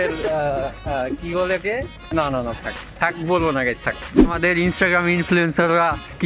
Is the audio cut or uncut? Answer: cut